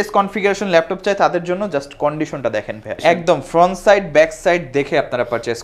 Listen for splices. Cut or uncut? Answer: cut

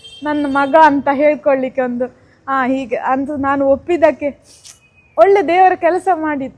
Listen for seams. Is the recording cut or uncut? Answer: uncut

